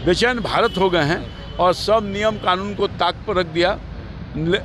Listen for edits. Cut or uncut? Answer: uncut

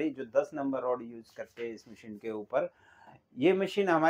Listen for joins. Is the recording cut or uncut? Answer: uncut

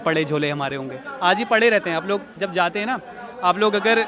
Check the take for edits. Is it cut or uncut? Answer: uncut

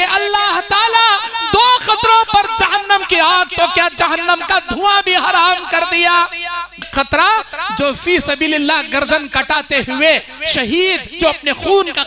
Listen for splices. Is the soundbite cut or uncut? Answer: cut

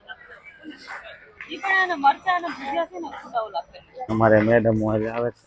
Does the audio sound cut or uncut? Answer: cut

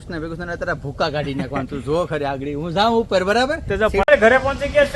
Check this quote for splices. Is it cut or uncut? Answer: cut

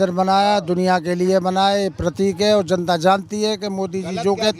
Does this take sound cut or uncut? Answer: uncut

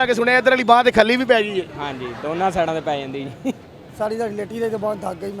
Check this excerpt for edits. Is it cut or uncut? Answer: cut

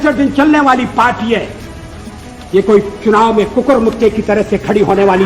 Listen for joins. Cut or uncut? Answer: uncut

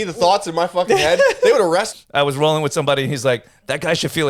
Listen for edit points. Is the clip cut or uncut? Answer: cut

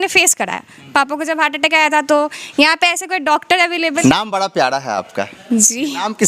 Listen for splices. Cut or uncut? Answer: cut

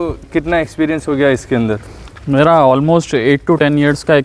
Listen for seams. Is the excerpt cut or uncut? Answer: uncut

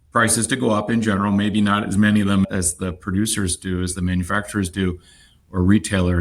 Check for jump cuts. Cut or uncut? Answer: uncut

